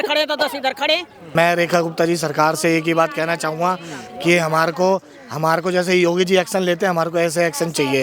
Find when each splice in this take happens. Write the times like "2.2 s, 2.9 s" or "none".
1.2 s